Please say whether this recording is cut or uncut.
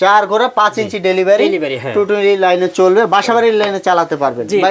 uncut